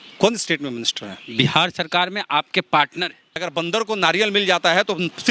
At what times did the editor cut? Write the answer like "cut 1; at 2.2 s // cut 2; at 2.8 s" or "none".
cut 1; at 3.4 s